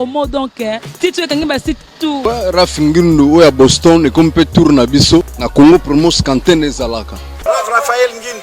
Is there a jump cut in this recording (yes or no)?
yes